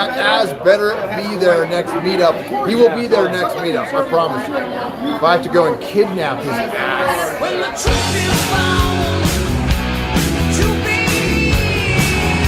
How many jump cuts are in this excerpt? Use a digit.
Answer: 1